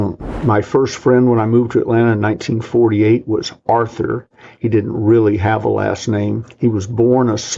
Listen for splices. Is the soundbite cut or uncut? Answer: uncut